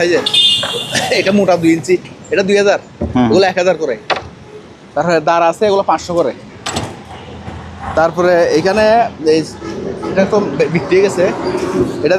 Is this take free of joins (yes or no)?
yes